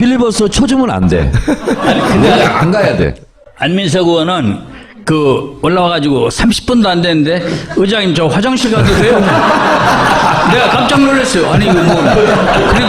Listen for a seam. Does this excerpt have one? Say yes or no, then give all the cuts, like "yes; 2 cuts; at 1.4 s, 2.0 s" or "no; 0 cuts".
yes; 1 cut; at 5.7 s